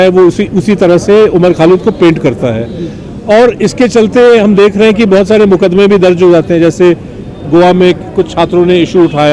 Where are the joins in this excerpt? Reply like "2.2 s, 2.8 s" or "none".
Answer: none